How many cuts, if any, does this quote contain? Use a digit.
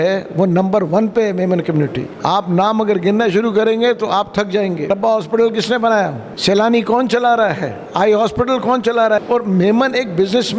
5